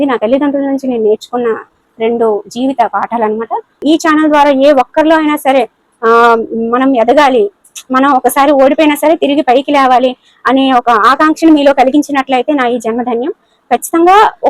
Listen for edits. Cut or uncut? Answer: cut